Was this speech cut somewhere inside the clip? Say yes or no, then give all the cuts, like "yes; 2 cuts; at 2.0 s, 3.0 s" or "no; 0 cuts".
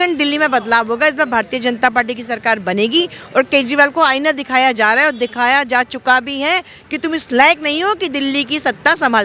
no; 0 cuts